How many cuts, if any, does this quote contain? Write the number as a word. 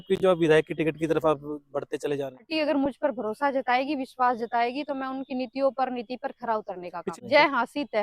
two